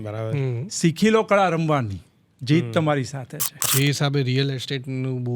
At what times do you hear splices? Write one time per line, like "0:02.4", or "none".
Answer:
0:03.6